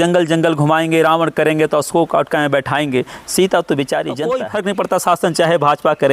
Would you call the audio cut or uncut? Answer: cut